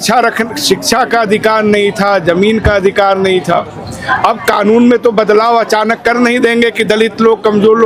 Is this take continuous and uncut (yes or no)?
yes